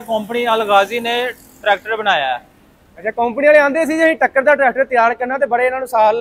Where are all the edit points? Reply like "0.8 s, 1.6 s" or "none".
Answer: none